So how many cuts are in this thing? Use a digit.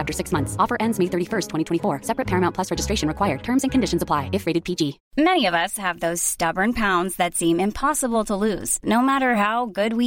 1